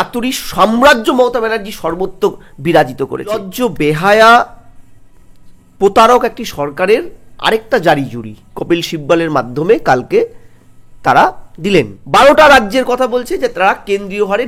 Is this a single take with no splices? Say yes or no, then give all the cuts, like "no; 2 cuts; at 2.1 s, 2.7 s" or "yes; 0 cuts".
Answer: no; 2 cuts; at 3.5 s, 12.0 s